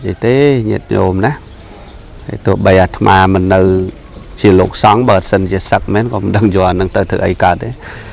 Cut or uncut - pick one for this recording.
uncut